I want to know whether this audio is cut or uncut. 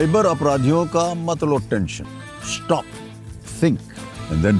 uncut